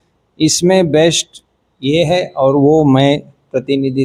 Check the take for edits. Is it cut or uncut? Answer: uncut